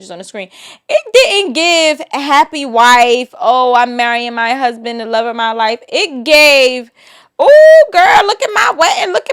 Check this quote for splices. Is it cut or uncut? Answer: uncut